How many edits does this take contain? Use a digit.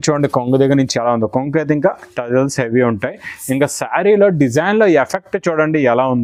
0